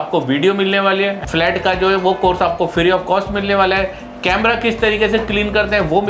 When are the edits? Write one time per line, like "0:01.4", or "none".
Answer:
0:01.2